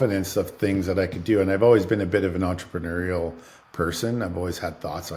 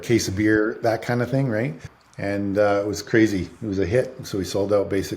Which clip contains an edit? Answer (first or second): second